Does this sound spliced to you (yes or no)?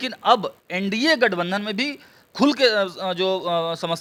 no